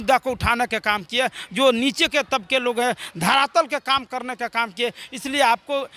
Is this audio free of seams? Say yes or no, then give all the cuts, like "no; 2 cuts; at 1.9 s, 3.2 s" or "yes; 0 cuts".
yes; 0 cuts